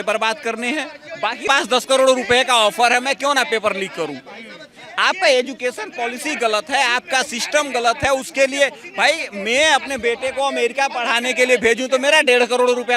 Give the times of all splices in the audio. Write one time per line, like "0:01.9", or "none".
0:01.5